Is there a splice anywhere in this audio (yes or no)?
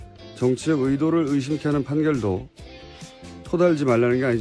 yes